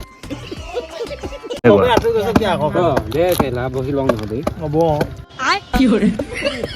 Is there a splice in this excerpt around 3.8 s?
no; 1 cut; at 1.6 s

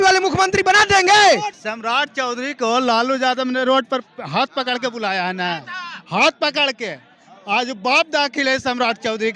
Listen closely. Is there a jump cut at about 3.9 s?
no; 1 cut; at 1.5 s

